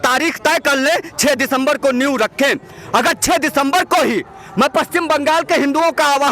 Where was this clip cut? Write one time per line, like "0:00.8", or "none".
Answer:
none